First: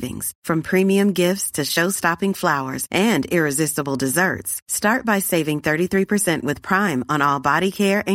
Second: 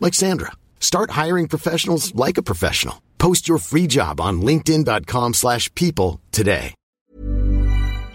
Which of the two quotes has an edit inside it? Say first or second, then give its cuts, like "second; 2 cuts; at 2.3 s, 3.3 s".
second; 1 cut; at 6.8 s